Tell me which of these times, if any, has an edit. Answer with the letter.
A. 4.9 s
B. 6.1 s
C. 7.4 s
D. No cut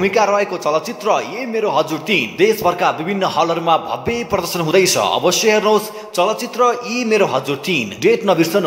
D